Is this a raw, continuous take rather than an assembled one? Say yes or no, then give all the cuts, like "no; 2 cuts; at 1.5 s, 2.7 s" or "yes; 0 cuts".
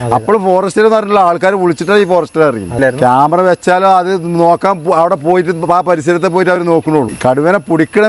no; 2 cuts; at 2.7 s, 7.1 s